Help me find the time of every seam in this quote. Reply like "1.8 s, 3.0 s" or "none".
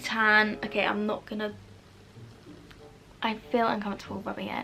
none